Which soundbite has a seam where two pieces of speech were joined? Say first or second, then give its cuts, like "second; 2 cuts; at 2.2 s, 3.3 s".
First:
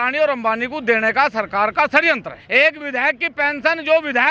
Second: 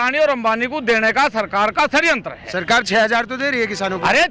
first; 1 cut; at 2.4 s